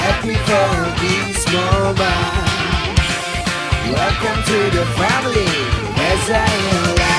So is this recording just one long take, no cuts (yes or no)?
yes